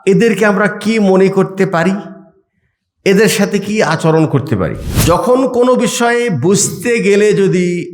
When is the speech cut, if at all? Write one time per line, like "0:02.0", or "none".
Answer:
0:04.9